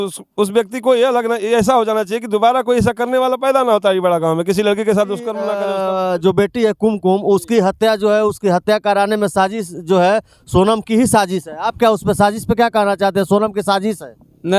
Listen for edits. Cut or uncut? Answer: cut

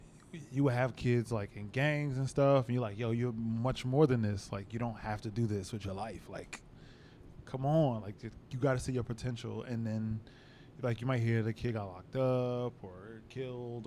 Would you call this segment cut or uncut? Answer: uncut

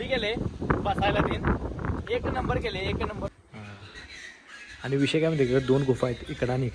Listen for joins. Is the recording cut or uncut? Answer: cut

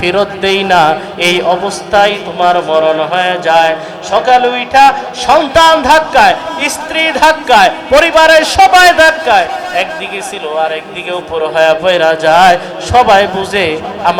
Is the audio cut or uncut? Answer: uncut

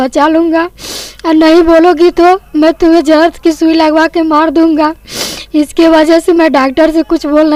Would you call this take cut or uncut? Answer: uncut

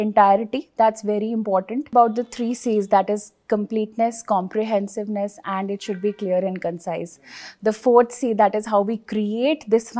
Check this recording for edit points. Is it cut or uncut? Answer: cut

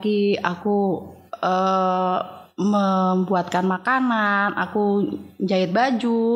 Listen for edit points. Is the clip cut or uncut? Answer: uncut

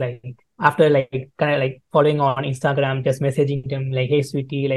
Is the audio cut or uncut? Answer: uncut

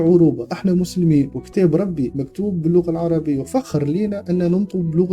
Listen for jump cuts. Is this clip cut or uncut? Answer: uncut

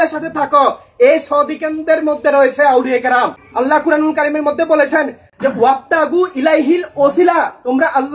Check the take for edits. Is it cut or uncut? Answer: cut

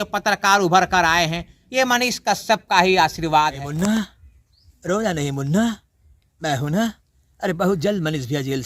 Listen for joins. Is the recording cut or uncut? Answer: cut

